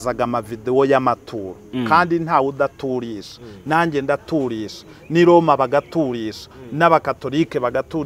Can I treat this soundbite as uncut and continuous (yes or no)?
yes